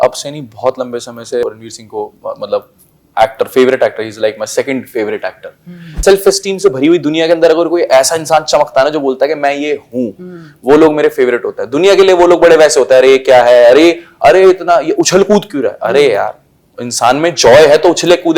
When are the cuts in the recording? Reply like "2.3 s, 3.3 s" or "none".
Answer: 1.5 s, 5.9 s